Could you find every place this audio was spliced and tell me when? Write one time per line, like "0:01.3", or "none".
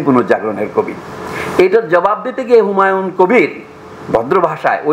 none